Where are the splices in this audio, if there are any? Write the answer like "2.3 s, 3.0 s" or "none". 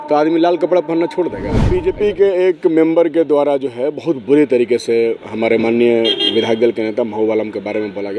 1.7 s

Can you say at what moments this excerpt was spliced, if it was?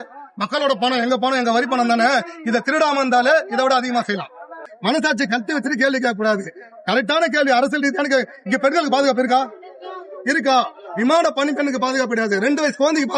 4.6 s

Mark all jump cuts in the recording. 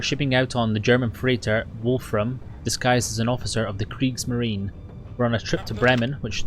4.9 s

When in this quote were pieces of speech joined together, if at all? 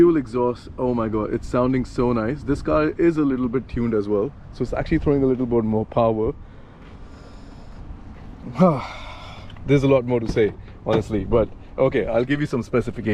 none

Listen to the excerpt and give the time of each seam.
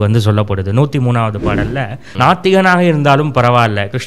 2.0 s

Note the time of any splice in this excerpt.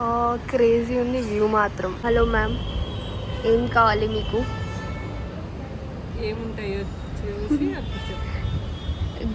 2.0 s

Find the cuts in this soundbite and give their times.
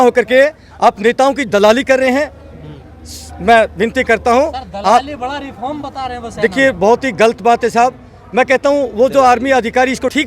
none

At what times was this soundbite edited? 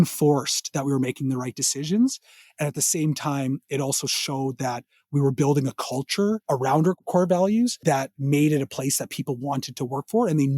6.4 s, 7.8 s

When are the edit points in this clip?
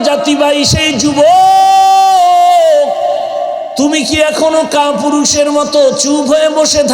3.7 s

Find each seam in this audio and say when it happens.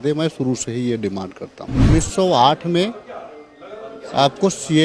1.9 s

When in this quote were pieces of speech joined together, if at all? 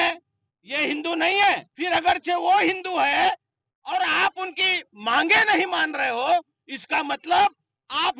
1.7 s

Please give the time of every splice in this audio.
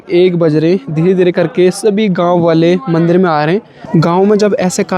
3.8 s

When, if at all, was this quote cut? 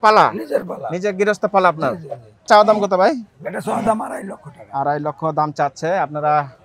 2.5 s

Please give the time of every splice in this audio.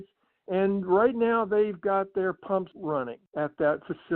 2.9 s

